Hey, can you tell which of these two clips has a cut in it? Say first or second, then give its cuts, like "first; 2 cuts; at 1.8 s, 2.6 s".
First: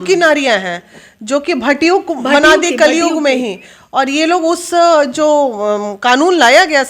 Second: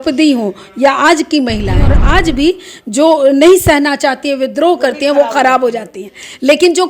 second; 1 cut; at 2.0 s